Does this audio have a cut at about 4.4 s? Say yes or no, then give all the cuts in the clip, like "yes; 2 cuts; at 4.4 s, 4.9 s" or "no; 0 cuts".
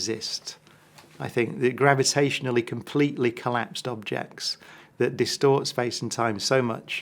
no; 0 cuts